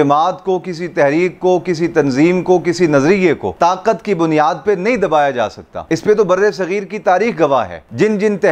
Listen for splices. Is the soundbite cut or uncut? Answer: cut